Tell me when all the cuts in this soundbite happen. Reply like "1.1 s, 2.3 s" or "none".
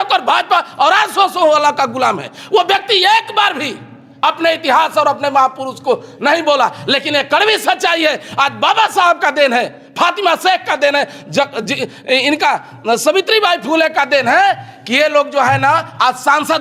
none